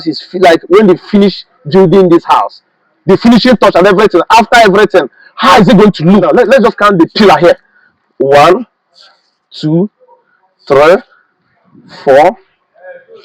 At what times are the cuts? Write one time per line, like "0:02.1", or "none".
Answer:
0:06.3